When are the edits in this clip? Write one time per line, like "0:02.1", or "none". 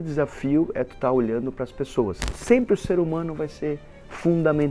0:02.3